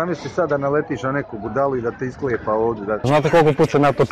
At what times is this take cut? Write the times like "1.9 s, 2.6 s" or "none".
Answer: 3.0 s

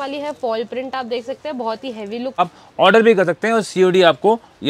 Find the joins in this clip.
2.4 s

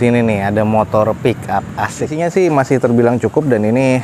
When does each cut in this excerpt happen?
2.1 s

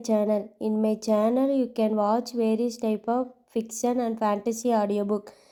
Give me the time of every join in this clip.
none

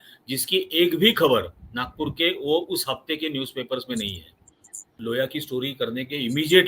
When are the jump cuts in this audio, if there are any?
5.0 s

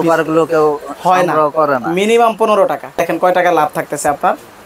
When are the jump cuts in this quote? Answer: none

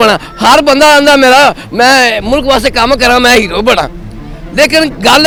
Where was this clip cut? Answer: none

